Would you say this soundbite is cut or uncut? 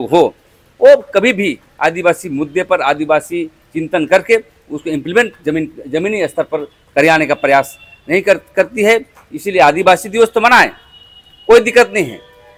uncut